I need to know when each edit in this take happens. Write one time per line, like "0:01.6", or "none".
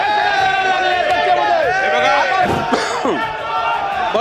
0:02.5